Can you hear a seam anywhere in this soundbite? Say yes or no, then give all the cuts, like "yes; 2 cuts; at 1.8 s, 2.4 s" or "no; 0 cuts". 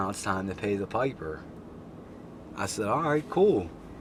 no; 0 cuts